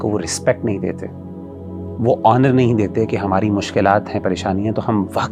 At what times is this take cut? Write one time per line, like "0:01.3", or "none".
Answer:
none